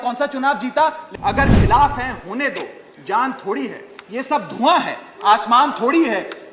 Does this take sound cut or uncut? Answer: cut